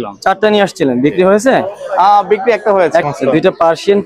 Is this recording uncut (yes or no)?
no